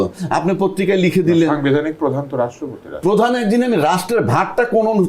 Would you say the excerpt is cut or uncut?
uncut